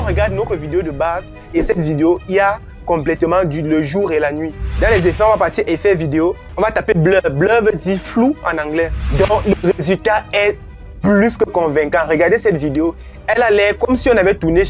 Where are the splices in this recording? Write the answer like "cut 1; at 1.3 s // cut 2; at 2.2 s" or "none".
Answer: cut 1; at 4.6 s // cut 2; at 9.0 s // cut 3; at 13.1 s